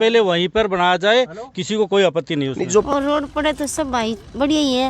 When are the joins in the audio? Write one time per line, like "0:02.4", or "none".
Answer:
0:02.9